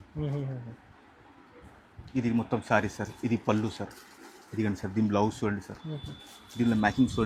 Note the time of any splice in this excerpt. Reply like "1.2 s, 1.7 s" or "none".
none